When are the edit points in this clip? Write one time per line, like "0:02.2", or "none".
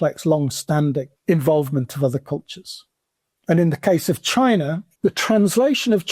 0:01.1
0:04.9